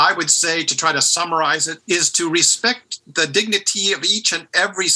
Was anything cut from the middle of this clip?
yes; 1 cut; at 1.7 s

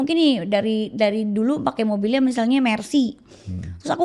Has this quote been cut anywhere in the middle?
no; 0 cuts

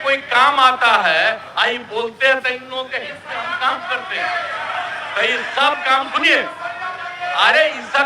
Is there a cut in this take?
no; 0 cuts

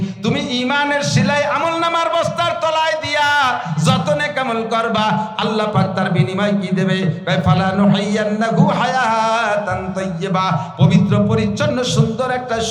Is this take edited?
no; 0 cuts

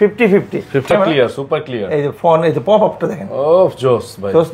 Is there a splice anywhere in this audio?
yes; 1 cut; at 0.9 s

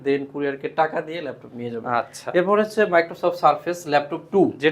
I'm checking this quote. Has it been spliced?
no; 0 cuts

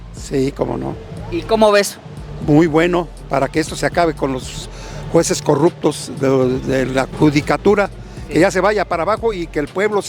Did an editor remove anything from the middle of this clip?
yes; 1 cut; at 7.1 s

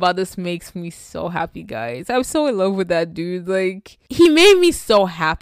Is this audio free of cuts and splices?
no; 1 cut; at 2.1 s

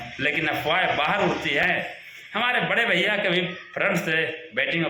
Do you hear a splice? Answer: yes; 1 cut; at 1.6 s

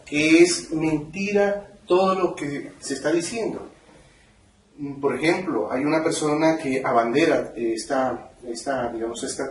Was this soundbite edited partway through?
yes; 1 cut; at 4.6 s

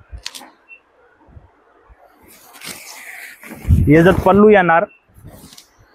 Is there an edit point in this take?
no; 0 cuts

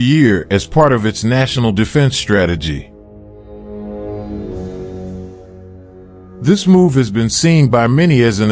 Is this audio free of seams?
no; 2 cuts; at 3.0 s, 6.3 s

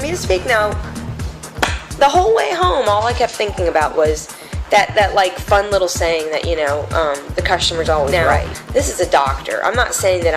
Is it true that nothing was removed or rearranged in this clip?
no; 1 cut; at 8.1 s

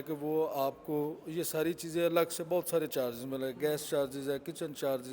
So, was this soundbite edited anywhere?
no; 0 cuts

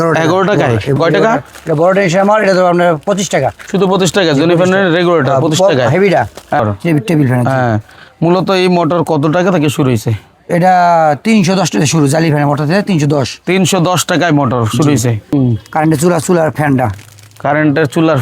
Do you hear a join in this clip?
yes; 3 cuts; at 1.0 s, 6.6 s, 15.3 s

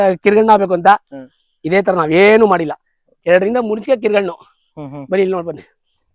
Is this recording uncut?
yes; 0 cuts

